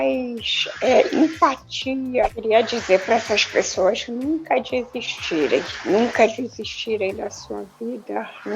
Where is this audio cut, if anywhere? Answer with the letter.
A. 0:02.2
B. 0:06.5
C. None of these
A